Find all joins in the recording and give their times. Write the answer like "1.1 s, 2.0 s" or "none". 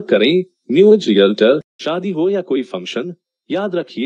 1.8 s

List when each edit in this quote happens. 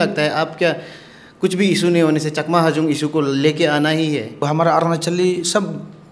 4.5 s

